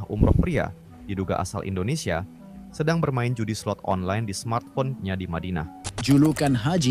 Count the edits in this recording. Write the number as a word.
one